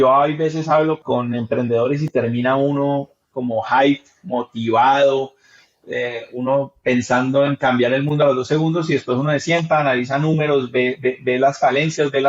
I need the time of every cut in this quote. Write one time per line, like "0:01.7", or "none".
0:01.0